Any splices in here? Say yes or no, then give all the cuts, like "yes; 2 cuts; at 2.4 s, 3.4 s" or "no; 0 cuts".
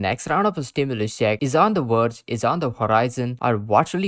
no; 0 cuts